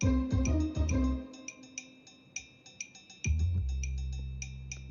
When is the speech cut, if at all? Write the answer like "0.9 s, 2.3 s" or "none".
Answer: none